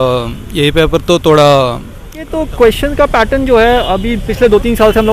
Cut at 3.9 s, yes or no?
no